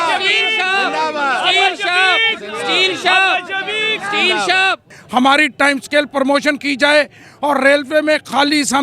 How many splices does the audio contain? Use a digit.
1